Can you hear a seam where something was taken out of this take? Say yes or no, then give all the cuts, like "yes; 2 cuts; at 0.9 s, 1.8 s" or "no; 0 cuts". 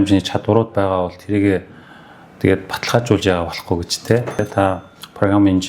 yes; 1 cut; at 4.4 s